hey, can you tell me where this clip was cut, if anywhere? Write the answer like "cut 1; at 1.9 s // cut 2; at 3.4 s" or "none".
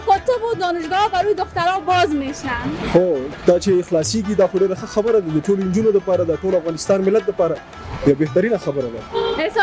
none